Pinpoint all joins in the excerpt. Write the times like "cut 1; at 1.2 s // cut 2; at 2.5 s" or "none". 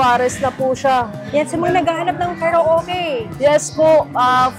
cut 1; at 1.2 s